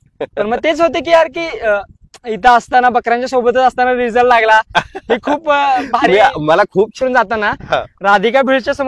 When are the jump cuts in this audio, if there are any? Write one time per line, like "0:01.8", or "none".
0:07.0